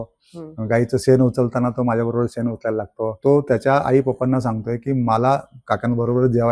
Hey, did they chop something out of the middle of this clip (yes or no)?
yes